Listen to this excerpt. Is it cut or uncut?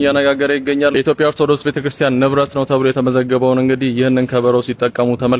cut